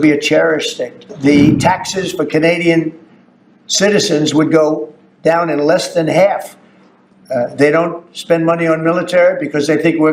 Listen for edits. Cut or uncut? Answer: cut